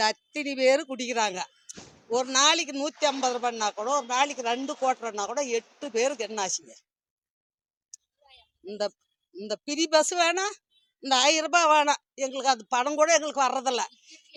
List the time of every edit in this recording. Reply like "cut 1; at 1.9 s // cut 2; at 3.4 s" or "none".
none